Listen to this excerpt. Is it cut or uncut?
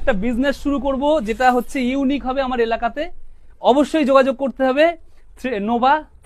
uncut